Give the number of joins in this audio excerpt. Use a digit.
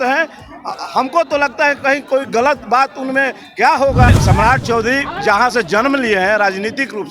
1